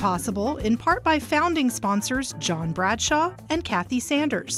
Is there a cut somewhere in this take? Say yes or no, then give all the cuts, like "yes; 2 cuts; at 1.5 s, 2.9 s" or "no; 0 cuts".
no; 0 cuts